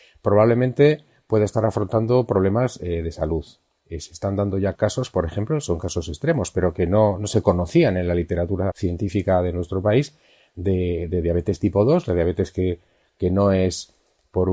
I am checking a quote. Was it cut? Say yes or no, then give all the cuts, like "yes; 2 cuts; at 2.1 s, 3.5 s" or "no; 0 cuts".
yes; 2 cuts; at 4.7 s, 8.8 s